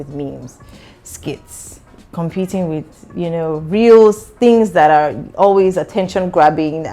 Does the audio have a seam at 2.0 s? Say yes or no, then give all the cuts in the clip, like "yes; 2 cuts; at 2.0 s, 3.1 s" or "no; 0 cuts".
no; 0 cuts